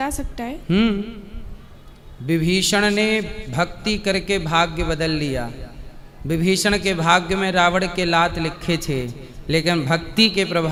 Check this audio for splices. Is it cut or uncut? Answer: uncut